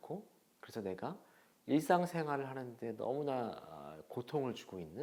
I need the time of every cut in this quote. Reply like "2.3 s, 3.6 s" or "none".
none